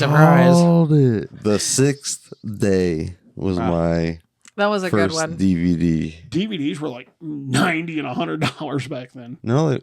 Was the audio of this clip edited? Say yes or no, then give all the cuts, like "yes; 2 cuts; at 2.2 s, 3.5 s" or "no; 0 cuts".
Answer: yes; 2 cuts; at 1.3 s, 6.2 s